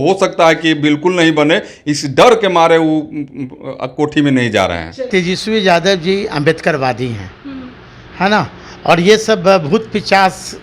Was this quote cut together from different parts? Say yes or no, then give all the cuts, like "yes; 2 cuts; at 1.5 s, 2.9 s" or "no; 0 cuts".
yes; 1 cut; at 5.1 s